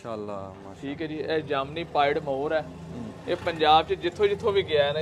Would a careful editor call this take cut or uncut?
uncut